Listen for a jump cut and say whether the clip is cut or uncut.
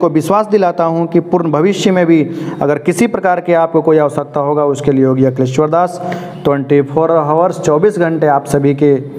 uncut